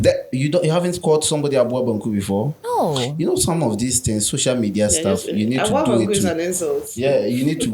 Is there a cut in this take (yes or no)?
no